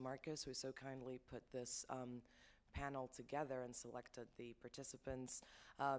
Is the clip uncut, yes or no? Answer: yes